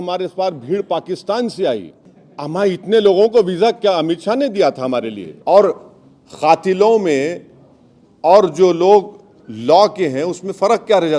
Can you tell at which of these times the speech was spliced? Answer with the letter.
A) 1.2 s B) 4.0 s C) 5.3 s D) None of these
C